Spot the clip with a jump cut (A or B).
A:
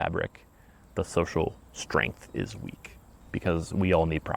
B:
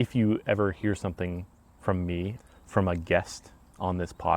B